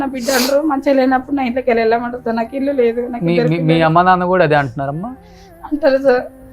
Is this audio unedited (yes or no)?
yes